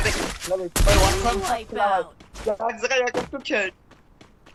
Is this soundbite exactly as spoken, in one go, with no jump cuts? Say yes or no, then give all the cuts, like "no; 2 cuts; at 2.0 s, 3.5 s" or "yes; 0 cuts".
yes; 0 cuts